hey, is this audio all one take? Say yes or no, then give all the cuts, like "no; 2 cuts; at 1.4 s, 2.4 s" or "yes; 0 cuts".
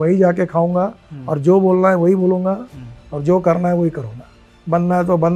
yes; 0 cuts